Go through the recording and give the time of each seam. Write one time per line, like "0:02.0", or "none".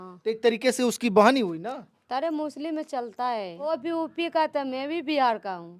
0:03.6